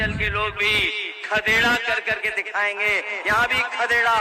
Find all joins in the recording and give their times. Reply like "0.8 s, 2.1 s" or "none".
none